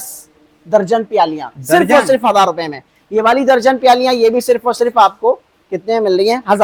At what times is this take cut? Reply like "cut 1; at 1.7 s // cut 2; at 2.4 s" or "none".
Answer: none

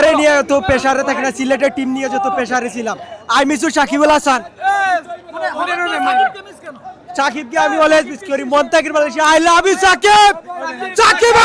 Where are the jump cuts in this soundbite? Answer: none

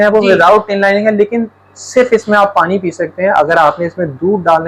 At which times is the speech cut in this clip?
none

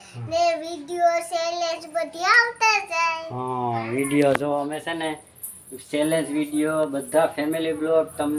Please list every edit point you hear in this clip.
none

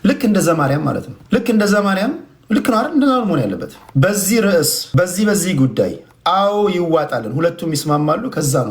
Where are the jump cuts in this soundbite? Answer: cut 1; at 1.1 s // cut 2; at 3.7 s // cut 3; at 4.8 s

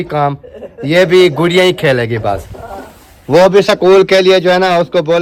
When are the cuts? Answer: none

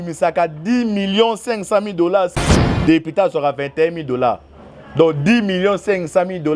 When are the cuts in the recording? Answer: cut 1; at 2.5 s

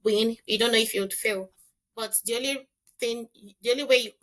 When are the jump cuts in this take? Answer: none

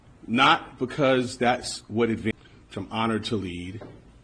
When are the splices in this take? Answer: none

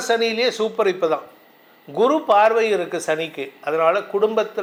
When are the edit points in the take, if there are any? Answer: none

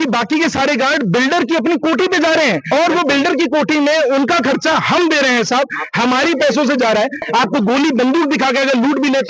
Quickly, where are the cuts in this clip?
cut 1; at 2.7 s // cut 2; at 7.2 s

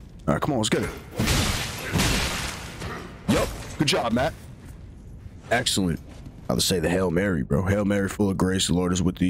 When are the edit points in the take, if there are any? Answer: cut 1; at 6.5 s

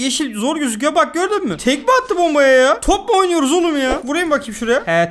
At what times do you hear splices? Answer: cut 1; at 4.0 s

